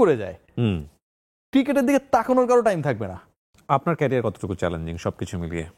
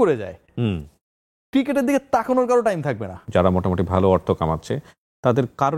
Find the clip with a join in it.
second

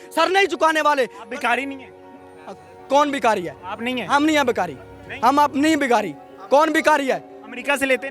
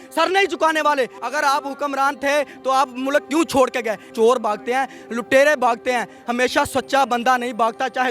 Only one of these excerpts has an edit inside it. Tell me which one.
second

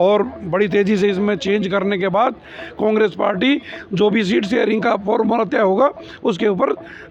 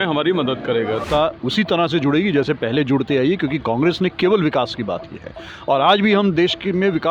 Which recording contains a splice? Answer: second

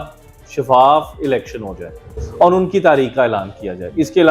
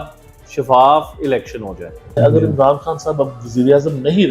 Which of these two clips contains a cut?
second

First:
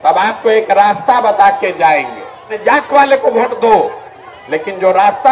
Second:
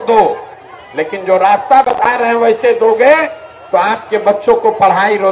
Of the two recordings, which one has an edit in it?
first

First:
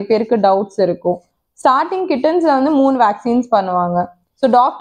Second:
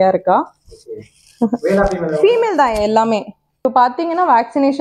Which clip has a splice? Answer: second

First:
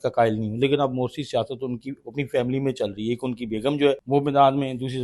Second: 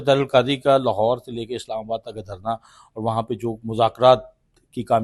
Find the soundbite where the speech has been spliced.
first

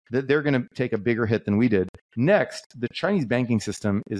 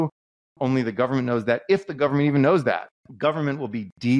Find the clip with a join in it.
second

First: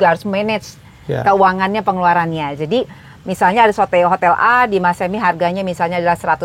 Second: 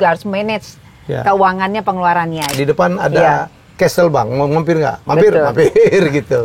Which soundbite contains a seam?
second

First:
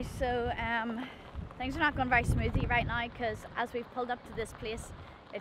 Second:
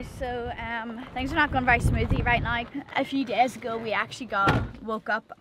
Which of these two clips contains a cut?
second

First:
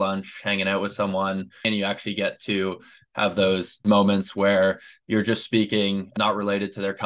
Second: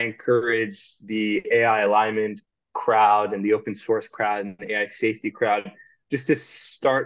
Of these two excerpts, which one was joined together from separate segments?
first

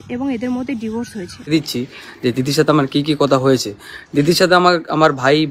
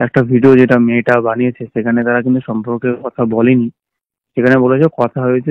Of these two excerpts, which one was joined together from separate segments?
first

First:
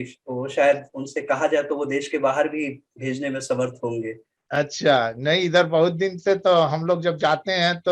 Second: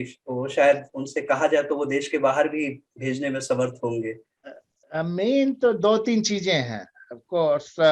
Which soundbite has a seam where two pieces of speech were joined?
second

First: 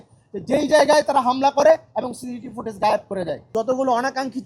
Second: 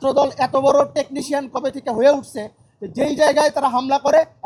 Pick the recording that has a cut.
first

